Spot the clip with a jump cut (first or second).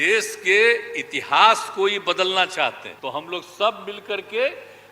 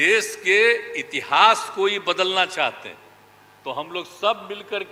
first